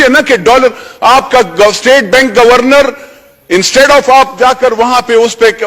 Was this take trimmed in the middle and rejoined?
no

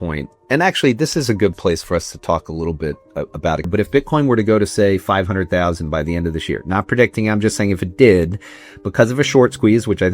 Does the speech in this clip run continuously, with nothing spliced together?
no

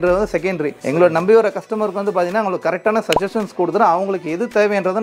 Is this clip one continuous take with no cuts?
yes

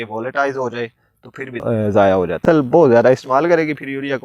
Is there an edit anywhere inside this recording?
yes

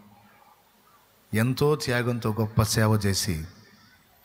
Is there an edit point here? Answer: no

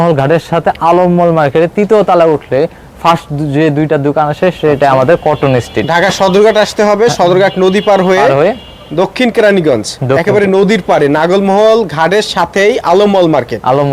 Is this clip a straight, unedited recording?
yes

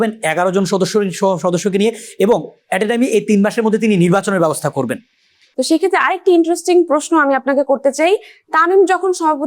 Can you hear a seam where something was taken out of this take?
yes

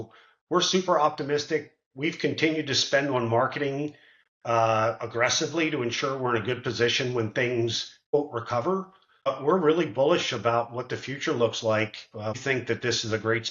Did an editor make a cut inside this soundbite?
yes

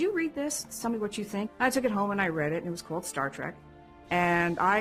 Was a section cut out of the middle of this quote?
yes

